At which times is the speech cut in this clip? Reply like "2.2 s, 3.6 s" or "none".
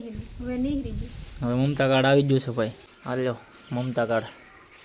2.8 s